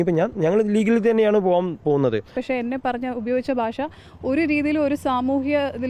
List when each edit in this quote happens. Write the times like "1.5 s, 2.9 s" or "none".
2.3 s